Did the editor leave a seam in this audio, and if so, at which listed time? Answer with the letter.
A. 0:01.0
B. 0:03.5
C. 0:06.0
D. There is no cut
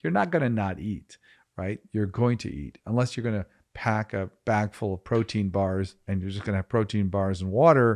C